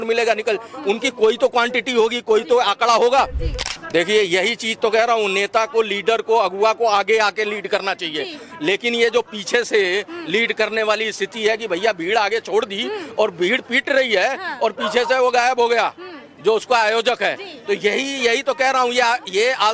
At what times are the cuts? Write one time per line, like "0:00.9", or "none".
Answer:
0:03.5